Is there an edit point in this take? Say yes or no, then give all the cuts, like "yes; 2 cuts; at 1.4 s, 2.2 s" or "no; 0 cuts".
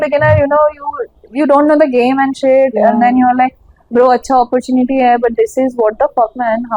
no; 0 cuts